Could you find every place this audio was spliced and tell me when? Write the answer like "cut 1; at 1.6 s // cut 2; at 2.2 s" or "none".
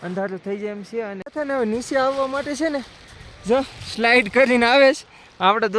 cut 1; at 1.2 s